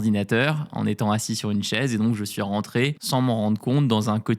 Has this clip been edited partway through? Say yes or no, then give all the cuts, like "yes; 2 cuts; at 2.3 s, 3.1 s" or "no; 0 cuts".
yes; 1 cut; at 3.0 s